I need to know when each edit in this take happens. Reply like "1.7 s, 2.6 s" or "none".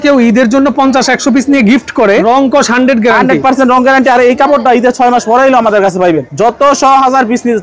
2.2 s, 6.3 s